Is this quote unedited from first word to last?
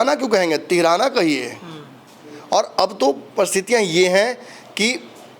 yes; 0 cuts

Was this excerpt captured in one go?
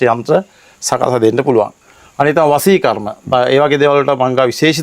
yes; 0 cuts

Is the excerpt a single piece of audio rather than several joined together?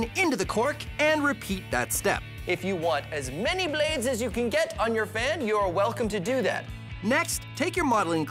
yes; 0 cuts

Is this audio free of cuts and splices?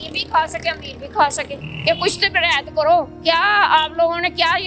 no; 1 cut; at 1.6 s

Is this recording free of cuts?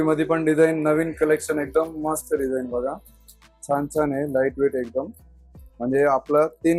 yes; 0 cuts

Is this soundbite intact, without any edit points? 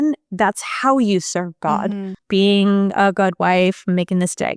no; 1 cut; at 2.1 s

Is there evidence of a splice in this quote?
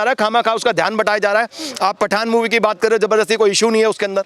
no; 0 cuts

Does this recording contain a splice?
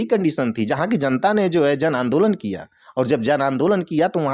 no; 0 cuts

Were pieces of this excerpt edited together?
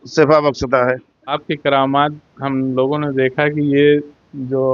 yes; 1 cut; at 1.4 s

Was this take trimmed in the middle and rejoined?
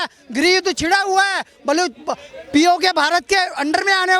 no; 0 cuts

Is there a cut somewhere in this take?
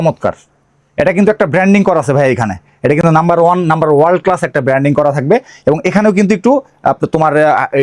no; 0 cuts

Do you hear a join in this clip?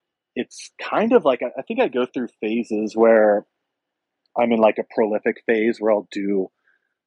no; 0 cuts

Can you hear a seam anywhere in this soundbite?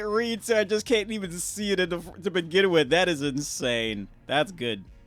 no; 0 cuts

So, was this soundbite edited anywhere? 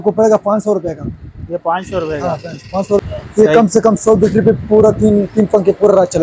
yes; 1 cut; at 3.0 s

